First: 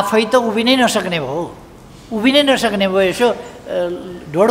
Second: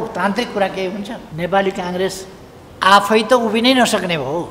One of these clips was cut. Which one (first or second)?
second